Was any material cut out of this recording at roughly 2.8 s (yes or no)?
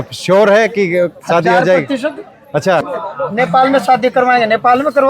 yes